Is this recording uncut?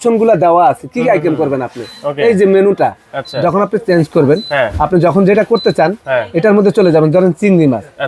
yes; 0 cuts

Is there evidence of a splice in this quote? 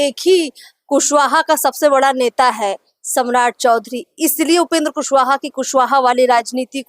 no; 0 cuts

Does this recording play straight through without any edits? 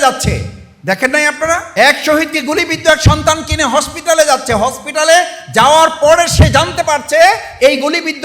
no; 1 cut; at 1.7 s

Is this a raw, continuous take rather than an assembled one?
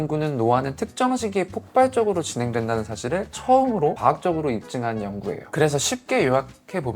no; 1 cut; at 5.4 s

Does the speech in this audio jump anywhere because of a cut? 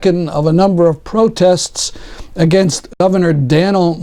yes; 1 cut; at 3.0 s

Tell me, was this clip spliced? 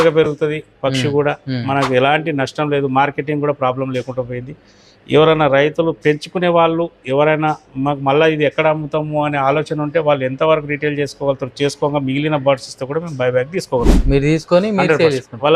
no; 0 cuts

